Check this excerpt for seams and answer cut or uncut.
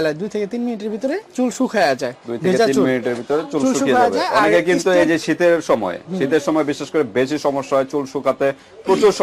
uncut